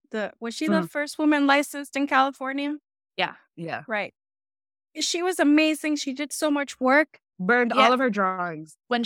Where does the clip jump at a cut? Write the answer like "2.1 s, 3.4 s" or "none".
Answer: none